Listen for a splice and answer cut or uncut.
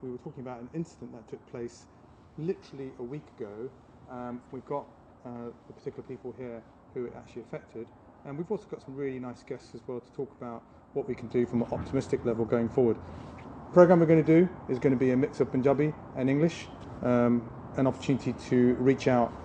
uncut